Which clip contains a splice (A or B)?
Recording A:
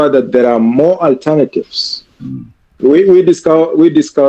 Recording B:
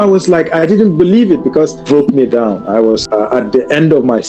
B